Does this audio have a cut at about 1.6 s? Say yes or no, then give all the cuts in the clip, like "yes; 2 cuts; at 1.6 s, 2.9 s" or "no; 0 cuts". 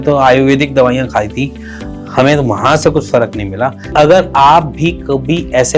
no; 1 cut; at 3.9 s